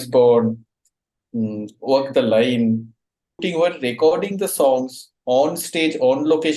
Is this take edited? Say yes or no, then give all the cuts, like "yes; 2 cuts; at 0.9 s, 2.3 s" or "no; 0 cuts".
yes; 1 cut; at 3.3 s